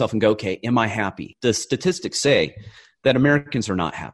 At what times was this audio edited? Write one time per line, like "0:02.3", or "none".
none